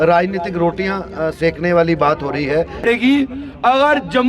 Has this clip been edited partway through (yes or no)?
yes